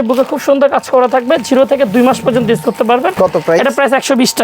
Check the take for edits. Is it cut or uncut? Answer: uncut